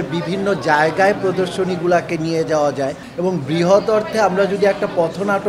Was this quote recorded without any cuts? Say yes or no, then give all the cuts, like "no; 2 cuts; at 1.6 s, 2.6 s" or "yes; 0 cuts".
no; 1 cut; at 3.0 s